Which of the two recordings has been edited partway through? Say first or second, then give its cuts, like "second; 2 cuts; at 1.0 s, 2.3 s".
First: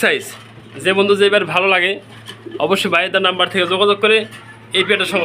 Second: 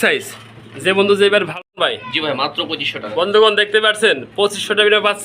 second; 1 cut; at 1.7 s